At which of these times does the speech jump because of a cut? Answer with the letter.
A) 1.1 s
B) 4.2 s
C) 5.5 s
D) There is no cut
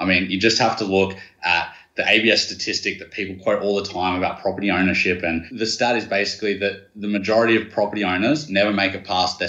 C